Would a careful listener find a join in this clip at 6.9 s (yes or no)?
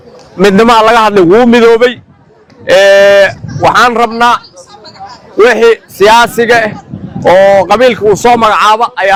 no